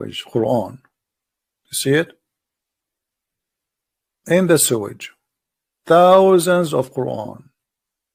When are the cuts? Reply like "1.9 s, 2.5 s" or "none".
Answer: none